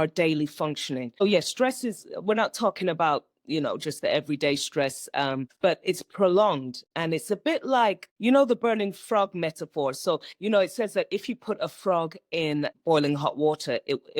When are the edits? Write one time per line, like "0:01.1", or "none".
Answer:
0:01.2
0:05.5
0:08.1
0:12.7